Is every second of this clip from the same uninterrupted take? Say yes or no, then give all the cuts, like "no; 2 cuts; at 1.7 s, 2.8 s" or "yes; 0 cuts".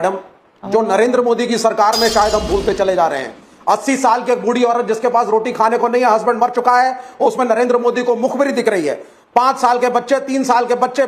yes; 0 cuts